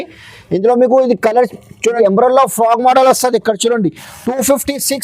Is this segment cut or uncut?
cut